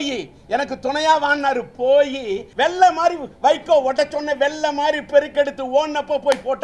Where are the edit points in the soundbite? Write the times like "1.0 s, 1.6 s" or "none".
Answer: 2.4 s